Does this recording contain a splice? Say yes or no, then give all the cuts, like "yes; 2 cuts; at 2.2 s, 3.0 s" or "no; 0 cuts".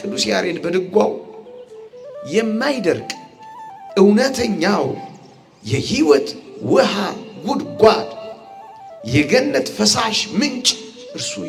no; 0 cuts